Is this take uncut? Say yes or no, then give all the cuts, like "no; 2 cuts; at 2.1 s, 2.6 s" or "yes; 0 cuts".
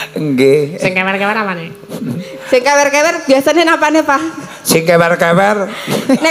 yes; 0 cuts